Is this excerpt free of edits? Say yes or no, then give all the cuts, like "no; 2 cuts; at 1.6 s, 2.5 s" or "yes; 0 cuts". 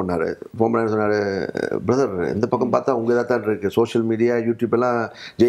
yes; 0 cuts